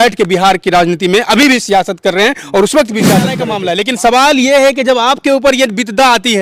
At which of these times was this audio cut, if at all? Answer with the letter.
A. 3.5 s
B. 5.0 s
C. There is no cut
A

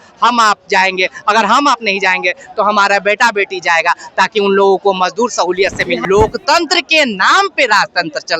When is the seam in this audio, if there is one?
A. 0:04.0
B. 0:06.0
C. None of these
B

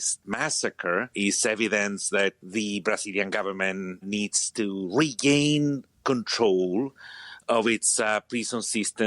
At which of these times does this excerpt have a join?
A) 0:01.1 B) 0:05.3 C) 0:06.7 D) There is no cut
A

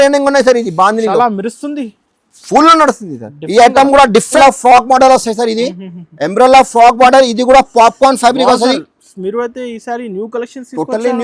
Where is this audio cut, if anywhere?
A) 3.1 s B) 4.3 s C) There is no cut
B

